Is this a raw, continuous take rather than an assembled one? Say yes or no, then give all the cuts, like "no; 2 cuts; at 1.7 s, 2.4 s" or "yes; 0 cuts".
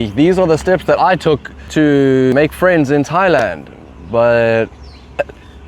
no; 2 cuts; at 1.6 s, 2.3 s